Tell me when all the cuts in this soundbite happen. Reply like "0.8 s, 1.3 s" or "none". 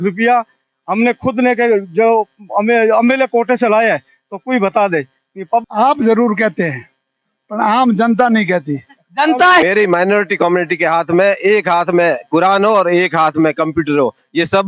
5.6 s, 9.6 s